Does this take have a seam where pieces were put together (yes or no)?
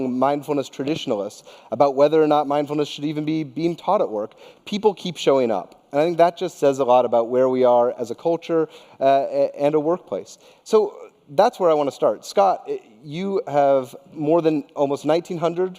yes